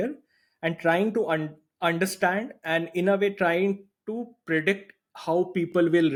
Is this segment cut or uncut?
uncut